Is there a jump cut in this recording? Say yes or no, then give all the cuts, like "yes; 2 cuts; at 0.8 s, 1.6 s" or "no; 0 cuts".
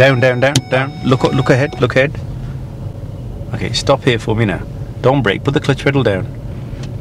no; 0 cuts